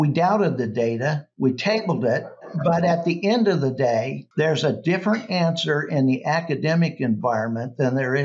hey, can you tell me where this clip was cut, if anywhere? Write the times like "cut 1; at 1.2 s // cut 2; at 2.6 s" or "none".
cut 1; at 2.5 s // cut 2; at 4.2 s